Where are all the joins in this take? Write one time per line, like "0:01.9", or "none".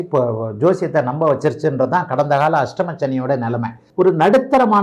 0:03.8